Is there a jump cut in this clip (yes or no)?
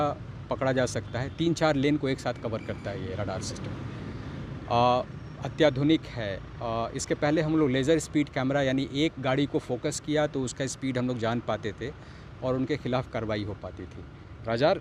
no